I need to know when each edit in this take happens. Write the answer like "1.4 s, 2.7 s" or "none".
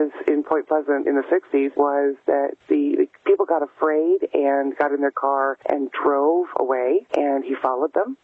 1.7 s, 2.6 s, 5.6 s, 7.1 s